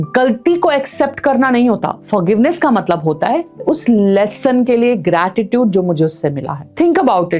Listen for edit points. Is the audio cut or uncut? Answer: uncut